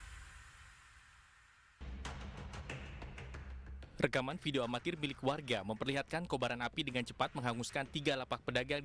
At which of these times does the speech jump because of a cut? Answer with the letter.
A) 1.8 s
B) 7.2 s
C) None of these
A